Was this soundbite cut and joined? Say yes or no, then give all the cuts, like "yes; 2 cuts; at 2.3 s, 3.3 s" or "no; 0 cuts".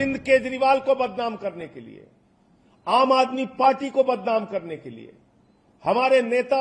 no; 0 cuts